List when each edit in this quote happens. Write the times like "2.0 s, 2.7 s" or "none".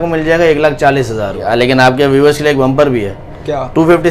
1.4 s